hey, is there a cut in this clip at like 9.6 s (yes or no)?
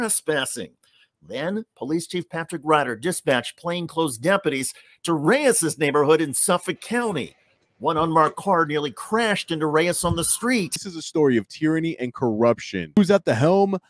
no